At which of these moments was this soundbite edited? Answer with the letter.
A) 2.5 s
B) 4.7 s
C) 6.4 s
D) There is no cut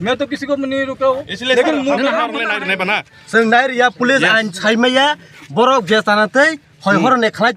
A